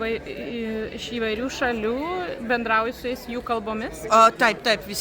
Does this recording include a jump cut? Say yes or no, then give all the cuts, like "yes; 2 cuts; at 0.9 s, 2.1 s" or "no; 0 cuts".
no; 0 cuts